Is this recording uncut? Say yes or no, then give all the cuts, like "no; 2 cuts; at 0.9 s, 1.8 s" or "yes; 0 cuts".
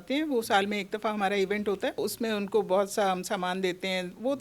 no; 1 cut; at 2.0 s